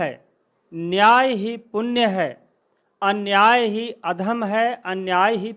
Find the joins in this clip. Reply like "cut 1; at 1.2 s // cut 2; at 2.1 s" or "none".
none